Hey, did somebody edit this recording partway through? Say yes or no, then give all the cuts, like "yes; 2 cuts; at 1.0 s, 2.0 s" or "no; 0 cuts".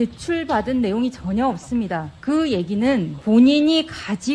yes; 2 cuts; at 2.1 s, 3.1 s